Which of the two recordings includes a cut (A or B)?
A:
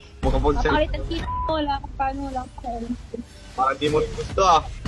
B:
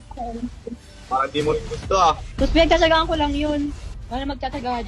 B